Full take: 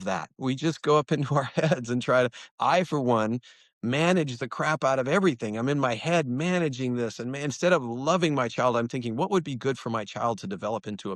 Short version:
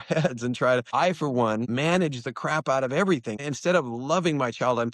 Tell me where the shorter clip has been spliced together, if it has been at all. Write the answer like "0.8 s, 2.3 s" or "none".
0.9 s, 1.7 s, 3.4 s